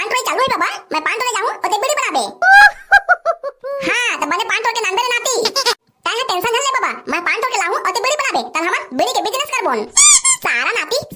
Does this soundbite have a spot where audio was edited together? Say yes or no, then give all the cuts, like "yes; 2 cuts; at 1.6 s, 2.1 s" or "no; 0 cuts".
no; 0 cuts